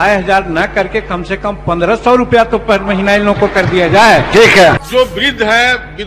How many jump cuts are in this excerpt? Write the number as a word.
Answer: one